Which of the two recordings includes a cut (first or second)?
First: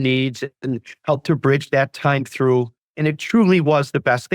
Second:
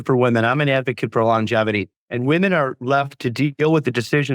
first